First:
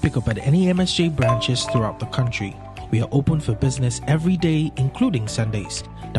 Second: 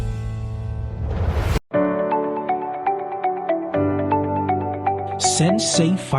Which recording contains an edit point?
second; 1 cut; at 1.6 s

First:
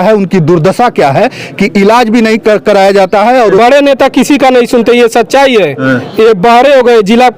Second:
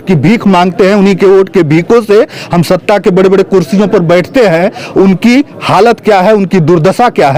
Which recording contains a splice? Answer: first; 1 cut; at 3.6 s

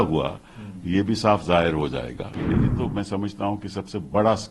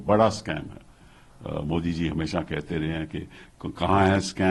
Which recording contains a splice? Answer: first; 1 cut; at 2.4 s

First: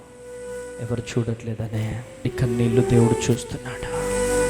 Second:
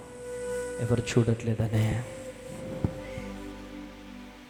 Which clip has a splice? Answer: first; 1 cut; at 2.2 s

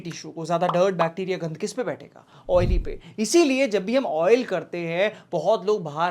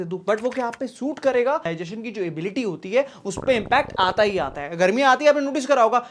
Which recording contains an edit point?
second; 1 cut; at 1.6 s

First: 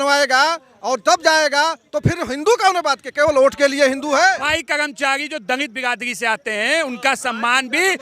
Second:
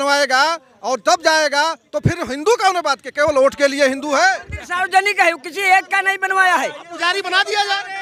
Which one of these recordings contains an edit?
first; 1 cut; at 4.5 s

